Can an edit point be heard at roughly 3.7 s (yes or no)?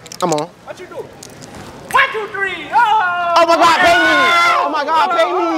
no